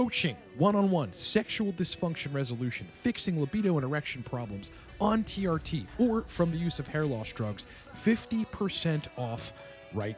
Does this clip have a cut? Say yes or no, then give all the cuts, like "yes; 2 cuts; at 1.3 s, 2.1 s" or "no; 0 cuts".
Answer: no; 0 cuts